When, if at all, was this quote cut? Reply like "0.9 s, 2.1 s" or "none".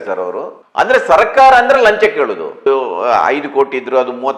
2.7 s